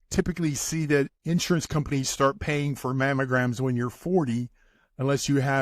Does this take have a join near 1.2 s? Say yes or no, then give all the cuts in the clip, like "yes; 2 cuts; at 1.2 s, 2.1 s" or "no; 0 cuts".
yes; 1 cut; at 1.2 s